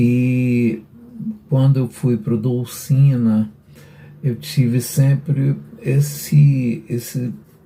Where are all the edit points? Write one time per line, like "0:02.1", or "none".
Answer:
none